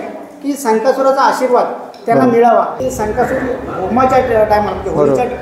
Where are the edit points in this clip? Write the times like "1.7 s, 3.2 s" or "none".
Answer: 2.8 s